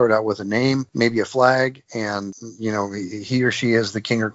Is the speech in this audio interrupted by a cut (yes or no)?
yes